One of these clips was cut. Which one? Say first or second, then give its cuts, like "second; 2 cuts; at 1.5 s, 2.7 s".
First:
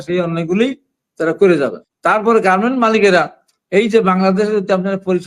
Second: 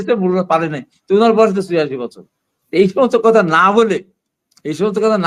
first; 1 cut; at 1.9 s